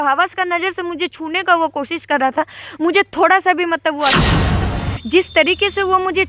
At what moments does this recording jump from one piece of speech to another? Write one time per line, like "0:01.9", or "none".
0:04.5